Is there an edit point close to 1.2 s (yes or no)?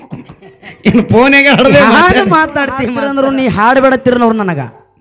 no